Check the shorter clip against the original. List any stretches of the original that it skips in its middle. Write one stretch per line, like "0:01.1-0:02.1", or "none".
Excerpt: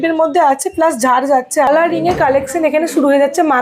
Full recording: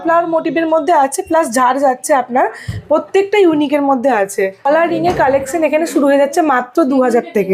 0:02.2-0:04.7